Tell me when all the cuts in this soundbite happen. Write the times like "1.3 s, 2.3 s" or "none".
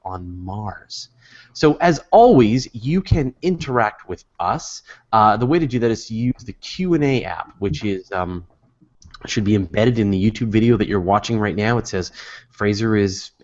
none